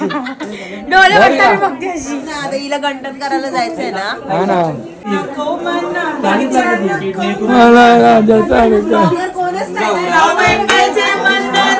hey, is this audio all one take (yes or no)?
no